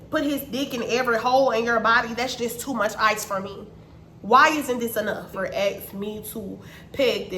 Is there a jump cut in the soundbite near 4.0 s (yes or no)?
no